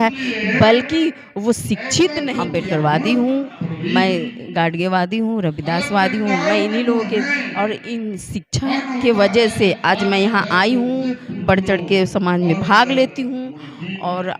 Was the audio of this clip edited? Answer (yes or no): yes